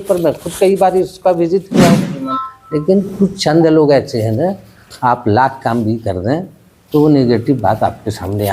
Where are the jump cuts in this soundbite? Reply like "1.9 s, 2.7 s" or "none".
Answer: 2.1 s